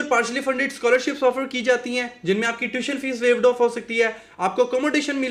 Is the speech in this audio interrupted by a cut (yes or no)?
no